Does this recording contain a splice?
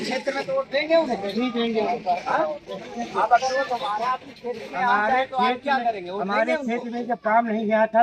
no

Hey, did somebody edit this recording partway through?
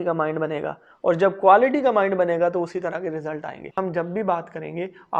yes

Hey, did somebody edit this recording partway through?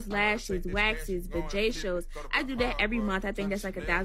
no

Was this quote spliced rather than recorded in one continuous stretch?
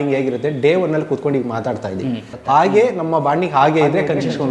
yes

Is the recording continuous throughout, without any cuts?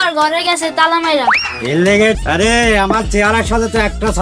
no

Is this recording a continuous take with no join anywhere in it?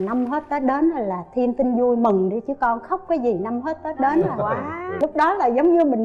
no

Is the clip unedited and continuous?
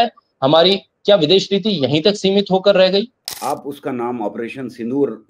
no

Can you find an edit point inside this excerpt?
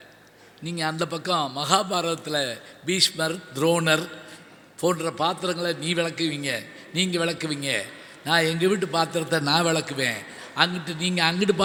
no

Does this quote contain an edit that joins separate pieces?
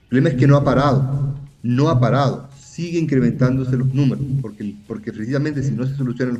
no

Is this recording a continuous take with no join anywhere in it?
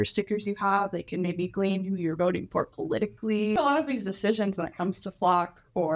no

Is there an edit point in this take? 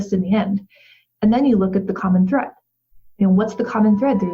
no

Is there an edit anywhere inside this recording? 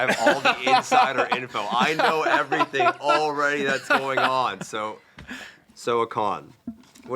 yes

